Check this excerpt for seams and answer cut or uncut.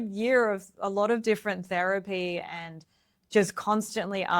uncut